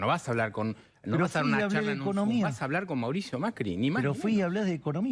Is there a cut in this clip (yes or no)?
no